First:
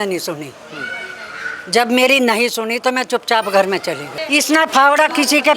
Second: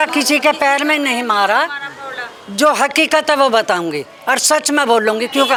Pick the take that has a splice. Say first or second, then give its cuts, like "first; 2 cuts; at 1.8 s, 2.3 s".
first; 1 cut; at 4.1 s